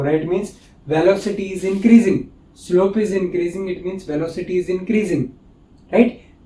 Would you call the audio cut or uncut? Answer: uncut